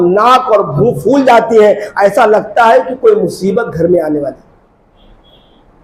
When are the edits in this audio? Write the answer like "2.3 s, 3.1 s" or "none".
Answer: none